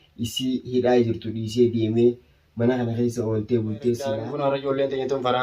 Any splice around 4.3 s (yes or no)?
yes